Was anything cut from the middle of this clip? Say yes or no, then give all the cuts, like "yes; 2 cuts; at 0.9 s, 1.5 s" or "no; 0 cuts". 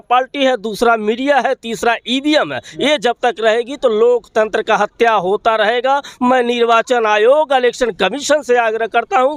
no; 0 cuts